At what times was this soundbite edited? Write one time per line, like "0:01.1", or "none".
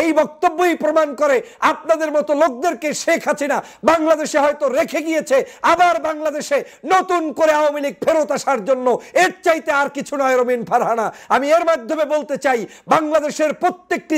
none